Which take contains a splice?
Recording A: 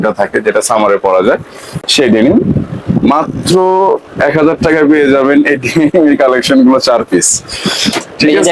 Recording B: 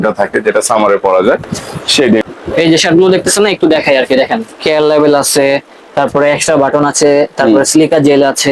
B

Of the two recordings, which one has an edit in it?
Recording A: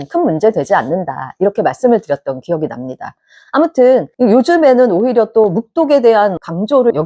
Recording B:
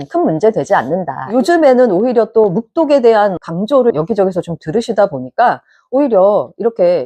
B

